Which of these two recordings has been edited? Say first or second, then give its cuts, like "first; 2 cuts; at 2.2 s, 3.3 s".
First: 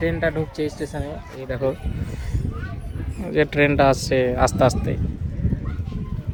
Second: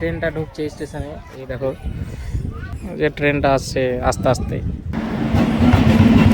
second; 2 cuts; at 2.7 s, 4.9 s